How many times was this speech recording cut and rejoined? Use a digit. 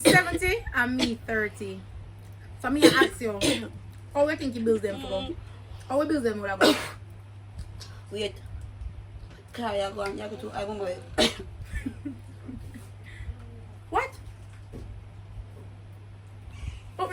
1